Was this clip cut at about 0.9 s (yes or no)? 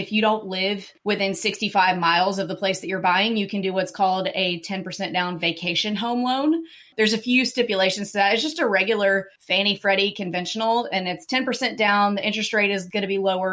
yes